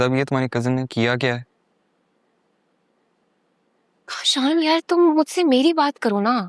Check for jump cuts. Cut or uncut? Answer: uncut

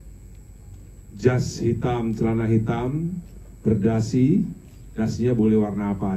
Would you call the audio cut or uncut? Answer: uncut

